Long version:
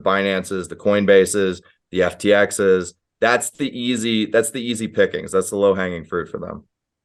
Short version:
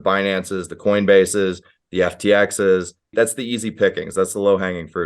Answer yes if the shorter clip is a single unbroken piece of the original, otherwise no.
no